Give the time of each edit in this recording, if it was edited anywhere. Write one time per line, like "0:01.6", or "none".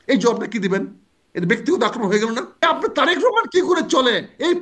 0:02.6